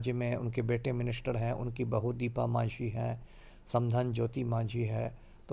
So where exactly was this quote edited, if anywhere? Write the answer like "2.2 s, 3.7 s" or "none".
none